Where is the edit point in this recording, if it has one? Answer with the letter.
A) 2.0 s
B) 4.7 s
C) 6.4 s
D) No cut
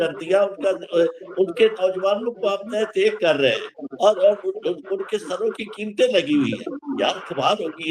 D